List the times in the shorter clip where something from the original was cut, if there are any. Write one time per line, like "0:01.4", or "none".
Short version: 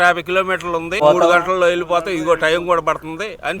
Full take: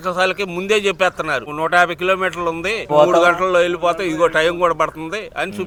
0:01.0